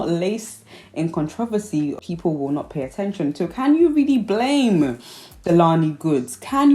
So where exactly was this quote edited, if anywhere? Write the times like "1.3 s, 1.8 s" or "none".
2.0 s